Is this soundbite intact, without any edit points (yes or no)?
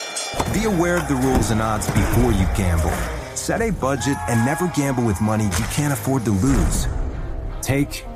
yes